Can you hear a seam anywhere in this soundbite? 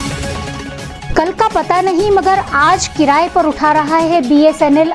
no; 0 cuts

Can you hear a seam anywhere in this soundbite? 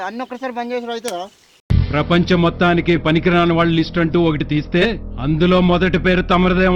no; 0 cuts

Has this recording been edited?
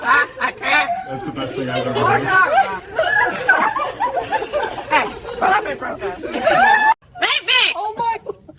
yes; 1 cut; at 7.1 s

